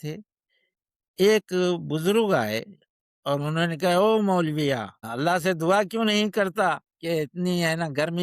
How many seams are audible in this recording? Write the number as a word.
one